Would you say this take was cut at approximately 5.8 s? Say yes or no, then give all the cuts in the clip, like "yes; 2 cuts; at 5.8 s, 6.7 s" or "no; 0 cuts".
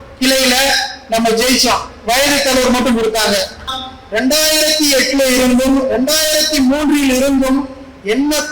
no; 1 cut; at 3.7 s